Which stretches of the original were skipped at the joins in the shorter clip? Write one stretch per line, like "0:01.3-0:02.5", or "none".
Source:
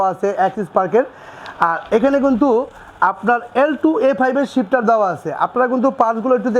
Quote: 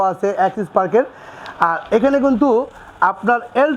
none